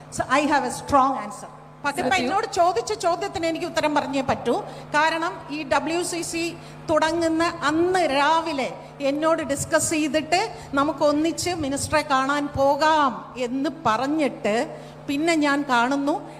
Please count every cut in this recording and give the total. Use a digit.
1